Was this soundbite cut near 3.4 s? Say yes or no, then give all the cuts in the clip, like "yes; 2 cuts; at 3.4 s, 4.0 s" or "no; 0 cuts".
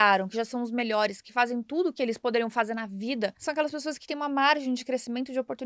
yes; 1 cut; at 3.4 s